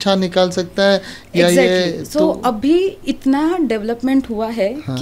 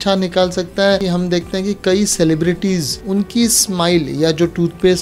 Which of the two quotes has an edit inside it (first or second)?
second